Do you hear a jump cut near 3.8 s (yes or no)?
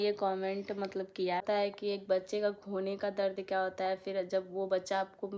no